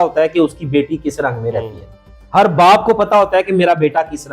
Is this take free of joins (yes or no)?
yes